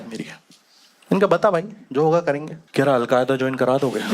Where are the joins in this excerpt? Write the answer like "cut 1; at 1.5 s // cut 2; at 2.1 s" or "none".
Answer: cut 1; at 2.5 s